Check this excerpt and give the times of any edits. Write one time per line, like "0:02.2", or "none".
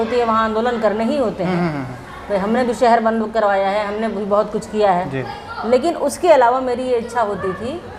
none